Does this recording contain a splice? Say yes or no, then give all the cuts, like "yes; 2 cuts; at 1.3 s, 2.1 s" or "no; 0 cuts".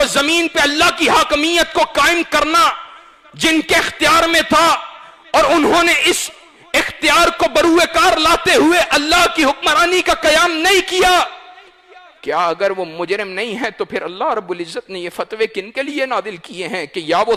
no; 0 cuts